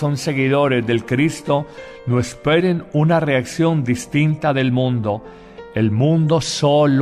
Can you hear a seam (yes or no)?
yes